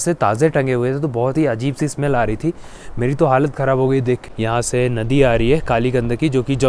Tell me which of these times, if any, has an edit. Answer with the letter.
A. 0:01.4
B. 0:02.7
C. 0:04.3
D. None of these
C